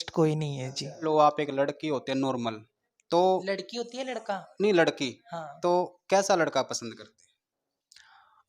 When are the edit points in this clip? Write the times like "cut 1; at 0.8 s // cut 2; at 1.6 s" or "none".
cut 1; at 1.0 s